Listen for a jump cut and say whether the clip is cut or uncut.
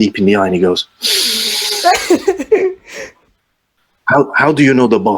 cut